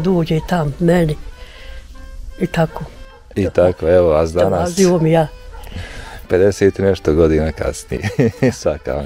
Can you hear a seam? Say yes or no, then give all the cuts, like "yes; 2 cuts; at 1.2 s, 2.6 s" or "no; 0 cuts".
no; 0 cuts